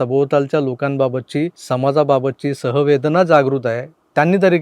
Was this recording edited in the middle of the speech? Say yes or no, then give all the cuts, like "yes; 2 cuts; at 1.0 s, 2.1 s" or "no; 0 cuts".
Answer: yes; 1 cut; at 1.6 s